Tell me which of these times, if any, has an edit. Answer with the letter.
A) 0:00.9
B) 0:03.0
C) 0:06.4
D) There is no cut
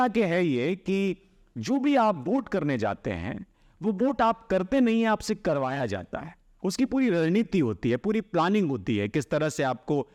D